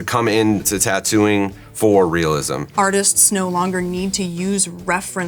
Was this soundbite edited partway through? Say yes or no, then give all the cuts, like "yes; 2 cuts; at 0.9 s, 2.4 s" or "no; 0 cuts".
yes; 1 cut; at 2.6 s